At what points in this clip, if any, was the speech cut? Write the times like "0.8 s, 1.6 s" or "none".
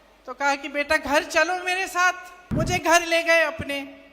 2.3 s

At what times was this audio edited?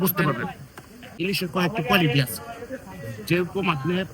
1.0 s

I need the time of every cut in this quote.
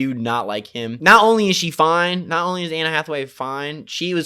0.9 s

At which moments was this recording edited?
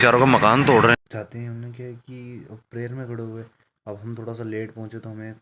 1.0 s

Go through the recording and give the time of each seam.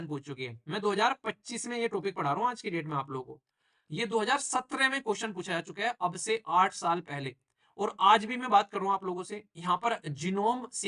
none

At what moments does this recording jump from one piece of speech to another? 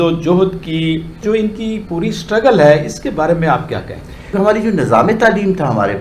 1.1 s, 4.3 s

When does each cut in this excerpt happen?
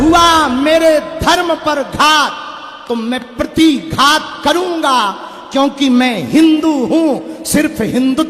none

